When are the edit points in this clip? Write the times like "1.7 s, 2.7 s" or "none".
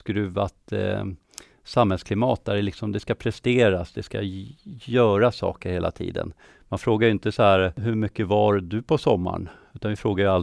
7.8 s